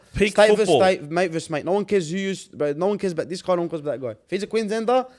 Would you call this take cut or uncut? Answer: uncut